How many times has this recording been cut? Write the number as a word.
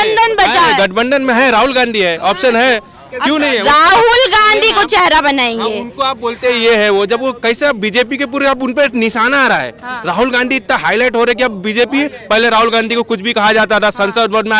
zero